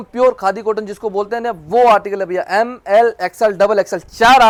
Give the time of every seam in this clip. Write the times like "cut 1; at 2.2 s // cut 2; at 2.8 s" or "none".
none